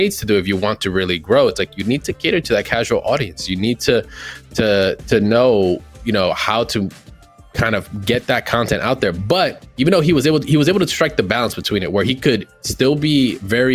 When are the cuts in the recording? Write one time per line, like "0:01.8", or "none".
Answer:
none